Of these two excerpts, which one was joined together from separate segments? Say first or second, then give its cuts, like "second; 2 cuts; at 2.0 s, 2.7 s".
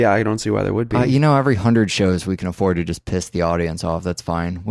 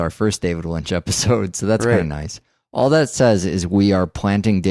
first; 1 cut; at 3.6 s